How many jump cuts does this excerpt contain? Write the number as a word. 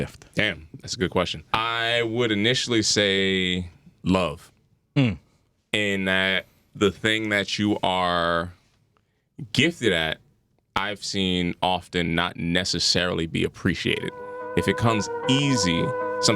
two